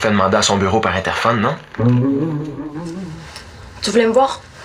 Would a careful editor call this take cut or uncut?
cut